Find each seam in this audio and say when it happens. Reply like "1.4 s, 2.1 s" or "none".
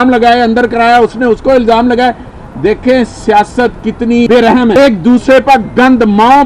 4.8 s